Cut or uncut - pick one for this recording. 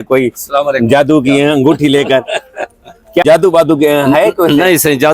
cut